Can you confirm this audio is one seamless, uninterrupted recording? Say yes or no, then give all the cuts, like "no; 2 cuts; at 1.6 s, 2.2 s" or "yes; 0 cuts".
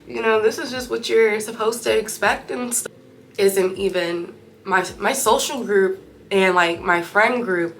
no; 1 cut; at 2.8 s